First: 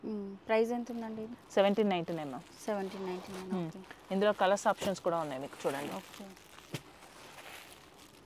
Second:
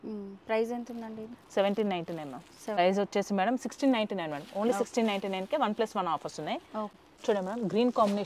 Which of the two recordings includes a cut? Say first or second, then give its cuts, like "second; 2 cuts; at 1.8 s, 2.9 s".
second; 2 cuts; at 2.8 s, 6.9 s